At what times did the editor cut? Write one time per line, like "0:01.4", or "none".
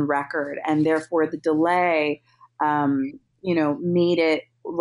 none